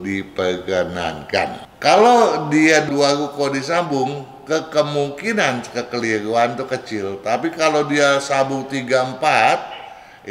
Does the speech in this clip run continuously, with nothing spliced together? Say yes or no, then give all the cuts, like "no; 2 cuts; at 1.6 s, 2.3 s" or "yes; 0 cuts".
no; 1 cut; at 1.6 s